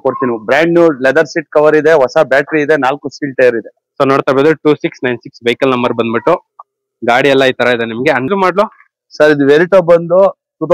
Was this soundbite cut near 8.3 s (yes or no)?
yes